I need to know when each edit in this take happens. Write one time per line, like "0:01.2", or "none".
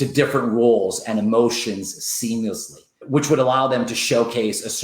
0:02.9